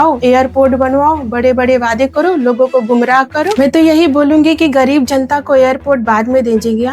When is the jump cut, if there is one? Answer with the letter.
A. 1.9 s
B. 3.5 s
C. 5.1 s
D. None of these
B